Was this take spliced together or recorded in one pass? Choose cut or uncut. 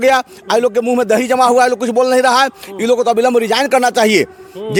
uncut